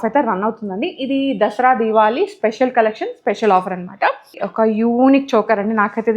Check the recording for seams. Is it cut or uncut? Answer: cut